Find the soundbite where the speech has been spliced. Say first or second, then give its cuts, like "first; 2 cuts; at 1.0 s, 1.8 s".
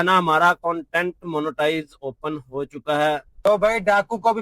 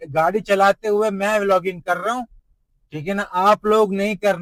first; 1 cut; at 3.3 s